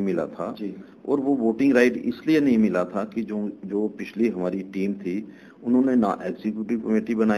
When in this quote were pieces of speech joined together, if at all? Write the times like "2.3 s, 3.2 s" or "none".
none